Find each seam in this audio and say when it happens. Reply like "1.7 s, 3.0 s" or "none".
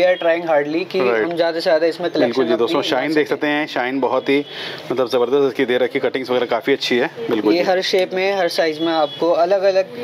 none